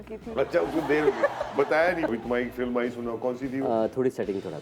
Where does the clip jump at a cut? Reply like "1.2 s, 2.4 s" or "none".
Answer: 2.1 s